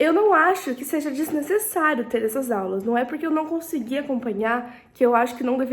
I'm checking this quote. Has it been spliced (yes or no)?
no